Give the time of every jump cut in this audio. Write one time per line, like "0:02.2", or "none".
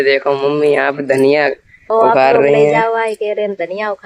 0:01.9